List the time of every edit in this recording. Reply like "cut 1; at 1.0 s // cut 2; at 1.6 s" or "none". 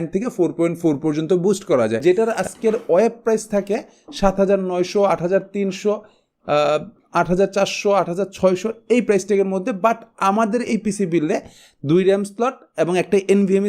cut 1; at 2.0 s